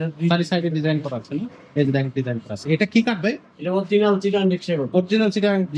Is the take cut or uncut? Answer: uncut